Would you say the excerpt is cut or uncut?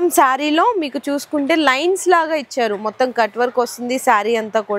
uncut